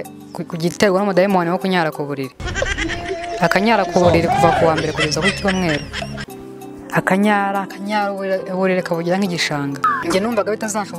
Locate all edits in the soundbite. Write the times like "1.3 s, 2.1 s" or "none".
10.0 s

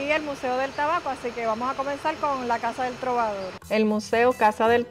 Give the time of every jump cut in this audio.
none

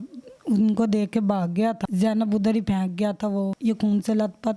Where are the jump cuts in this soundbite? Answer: 1.8 s, 3.5 s

